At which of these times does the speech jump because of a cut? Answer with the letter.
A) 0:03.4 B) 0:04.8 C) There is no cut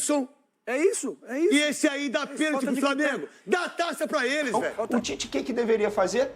B